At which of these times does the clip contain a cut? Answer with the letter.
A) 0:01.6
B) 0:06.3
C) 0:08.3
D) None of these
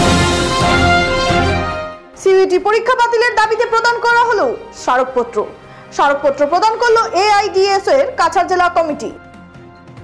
D